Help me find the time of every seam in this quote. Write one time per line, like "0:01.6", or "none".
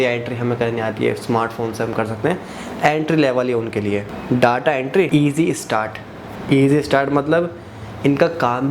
0:04.1
0:05.1